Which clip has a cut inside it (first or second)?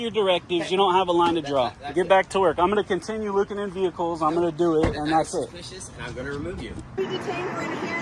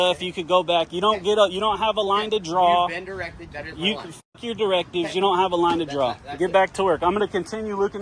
first